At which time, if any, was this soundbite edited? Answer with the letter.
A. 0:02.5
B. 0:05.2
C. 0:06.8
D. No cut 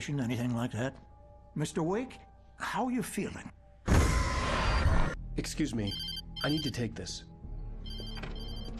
B